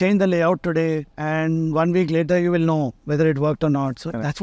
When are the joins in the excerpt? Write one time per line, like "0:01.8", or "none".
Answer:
0:01.1